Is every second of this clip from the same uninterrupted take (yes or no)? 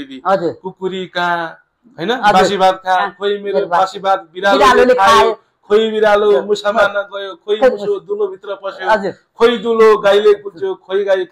yes